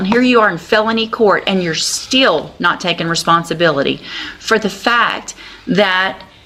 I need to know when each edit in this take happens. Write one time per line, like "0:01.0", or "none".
none